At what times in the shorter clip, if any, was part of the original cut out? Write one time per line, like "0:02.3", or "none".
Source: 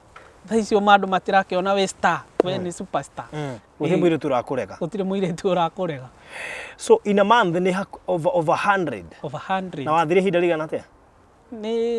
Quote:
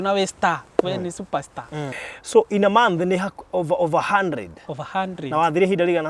0:02.0